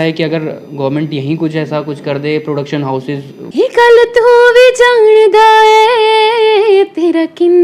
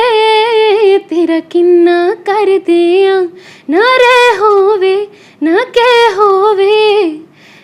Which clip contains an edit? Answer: first; 1 cut; at 3.4 s

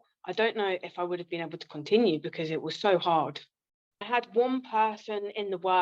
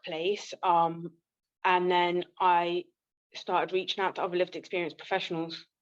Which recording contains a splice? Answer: first; 1 cut; at 3.9 s

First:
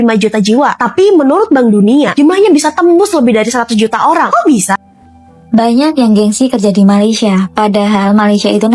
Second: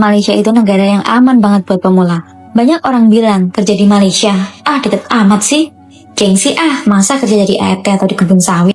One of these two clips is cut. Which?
first; 1 cut; at 4.8 s

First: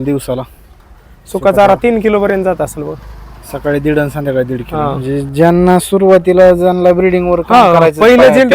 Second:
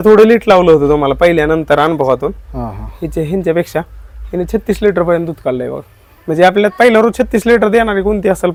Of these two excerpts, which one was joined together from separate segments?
first; 1 cut; at 5.0 s

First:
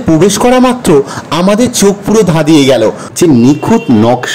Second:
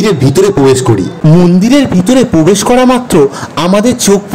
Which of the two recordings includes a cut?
first; 1 cut; at 3.3 s

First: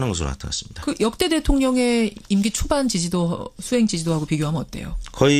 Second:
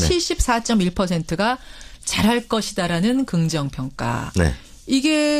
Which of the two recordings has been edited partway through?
first; 1 cut; at 3.9 s

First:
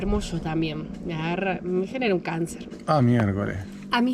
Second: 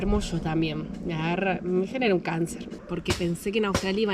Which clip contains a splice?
second; 1 cut; at 2.7 s

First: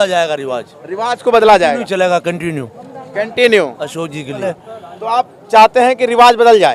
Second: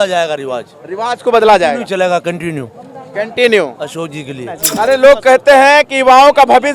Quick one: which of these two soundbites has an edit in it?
second; 1 cut; at 4.6 s

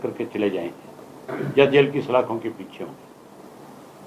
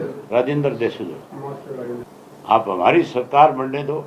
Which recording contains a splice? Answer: second; 1 cut; at 2.1 s

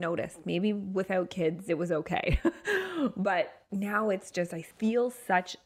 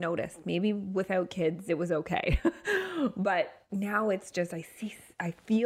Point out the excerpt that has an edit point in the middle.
first; 1 cut; at 4.7 s

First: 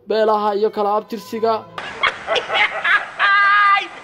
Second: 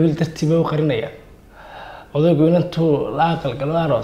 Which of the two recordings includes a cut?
first; 1 cut; at 1.7 s

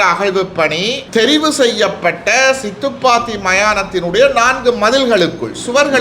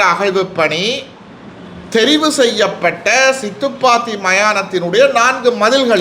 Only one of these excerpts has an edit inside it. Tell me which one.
first; 1 cut; at 1.0 s

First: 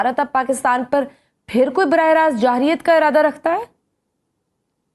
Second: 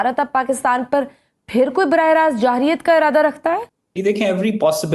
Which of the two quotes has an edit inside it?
second; 1 cut; at 3.8 s

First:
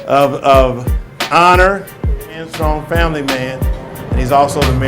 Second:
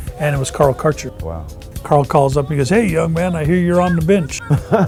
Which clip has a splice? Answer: first; 1 cut; at 2.5 s

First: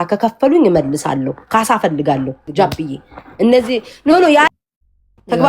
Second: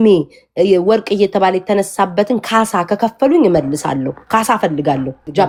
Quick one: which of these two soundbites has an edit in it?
first; 1 cut; at 4.5 s

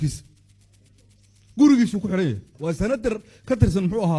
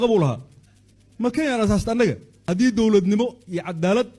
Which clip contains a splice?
second; 1 cut; at 2.3 s

